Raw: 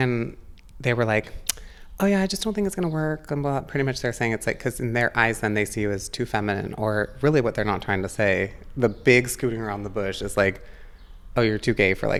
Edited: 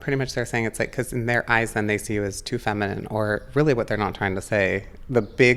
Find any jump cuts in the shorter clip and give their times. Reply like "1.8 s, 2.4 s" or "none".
none